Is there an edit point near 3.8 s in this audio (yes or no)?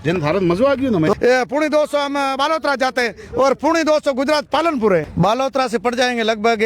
no